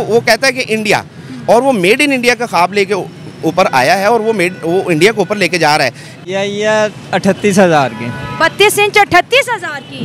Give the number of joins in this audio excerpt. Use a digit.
1